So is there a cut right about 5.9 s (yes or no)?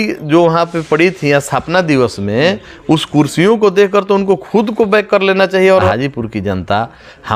yes